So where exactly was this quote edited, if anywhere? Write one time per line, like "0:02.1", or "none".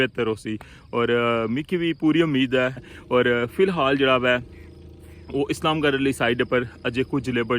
0:02.9